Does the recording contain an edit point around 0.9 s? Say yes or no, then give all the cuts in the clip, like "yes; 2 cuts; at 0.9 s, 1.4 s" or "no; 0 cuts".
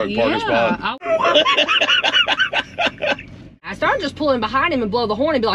yes; 2 cuts; at 0.9 s, 3.7 s